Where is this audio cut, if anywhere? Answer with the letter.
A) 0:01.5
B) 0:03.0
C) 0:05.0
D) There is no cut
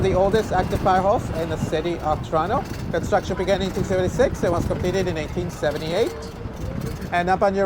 D